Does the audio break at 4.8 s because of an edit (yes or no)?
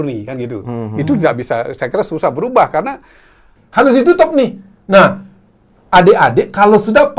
no